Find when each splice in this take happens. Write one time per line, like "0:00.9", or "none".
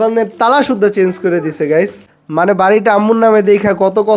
0:02.2